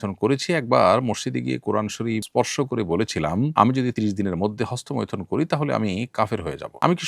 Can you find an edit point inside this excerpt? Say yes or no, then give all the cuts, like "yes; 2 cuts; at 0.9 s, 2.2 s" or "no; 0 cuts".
no; 0 cuts